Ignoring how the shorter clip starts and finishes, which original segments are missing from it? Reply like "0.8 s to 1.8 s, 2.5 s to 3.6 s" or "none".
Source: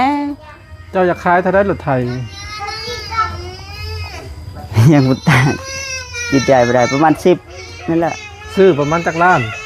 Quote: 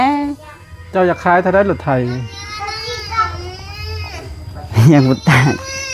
none